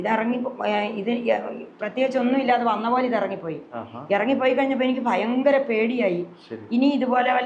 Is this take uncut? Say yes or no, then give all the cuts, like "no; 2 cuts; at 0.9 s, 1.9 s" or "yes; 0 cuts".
yes; 0 cuts